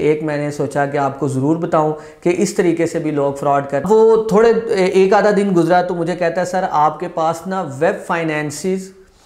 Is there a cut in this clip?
yes; 1 cut; at 3.8 s

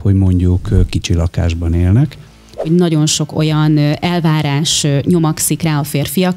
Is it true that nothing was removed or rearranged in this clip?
no; 1 cut; at 2.7 s

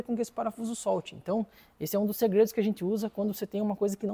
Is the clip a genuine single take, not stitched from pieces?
yes; 0 cuts

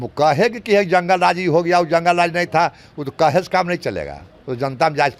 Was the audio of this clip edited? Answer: no; 0 cuts

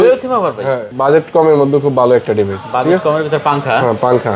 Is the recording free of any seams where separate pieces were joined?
no; 1 cut; at 1.0 s

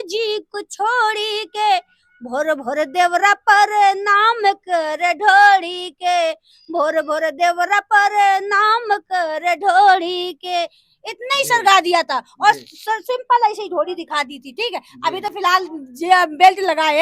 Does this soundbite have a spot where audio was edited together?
no; 0 cuts

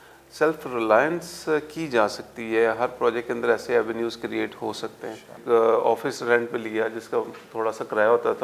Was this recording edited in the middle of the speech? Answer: yes; 1 cut; at 5.3 s

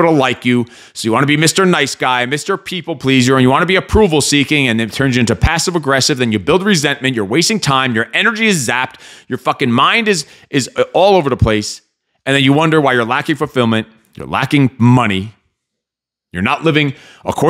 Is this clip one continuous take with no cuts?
yes; 0 cuts

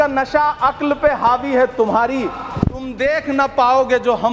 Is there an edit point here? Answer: no; 0 cuts

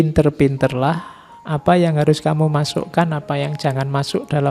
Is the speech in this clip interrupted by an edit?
no; 0 cuts

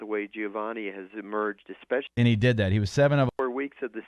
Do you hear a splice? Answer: yes; 2 cuts; at 2.1 s, 3.3 s

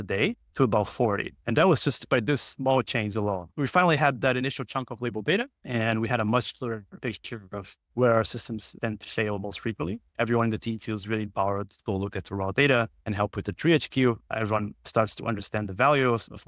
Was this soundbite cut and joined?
yes; 2 cuts; at 3.5 s, 10.1 s

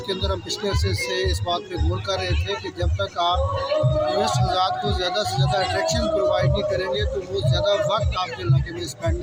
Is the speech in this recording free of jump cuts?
yes; 0 cuts

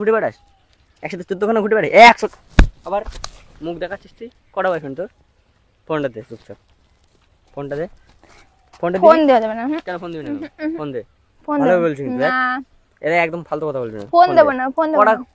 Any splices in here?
no; 0 cuts

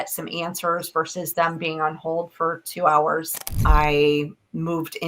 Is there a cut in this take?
yes; 1 cut; at 3.6 s

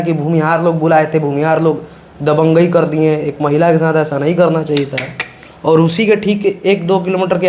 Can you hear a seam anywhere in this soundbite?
no; 0 cuts

